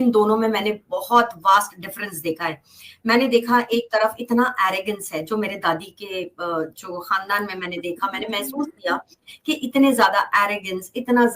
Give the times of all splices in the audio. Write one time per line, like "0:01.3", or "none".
none